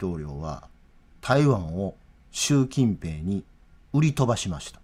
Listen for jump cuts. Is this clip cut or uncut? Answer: uncut